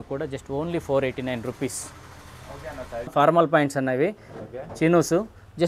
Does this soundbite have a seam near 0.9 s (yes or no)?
no